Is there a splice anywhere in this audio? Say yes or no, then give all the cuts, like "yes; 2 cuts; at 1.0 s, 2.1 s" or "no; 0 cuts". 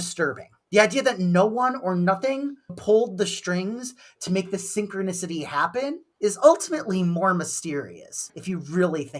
yes; 1 cut; at 8.2 s